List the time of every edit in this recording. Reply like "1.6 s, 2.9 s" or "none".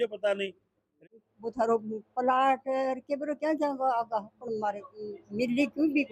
0.9 s